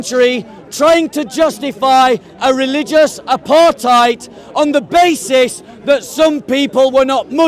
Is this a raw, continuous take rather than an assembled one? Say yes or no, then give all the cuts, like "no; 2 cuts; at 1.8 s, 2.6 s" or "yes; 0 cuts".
yes; 0 cuts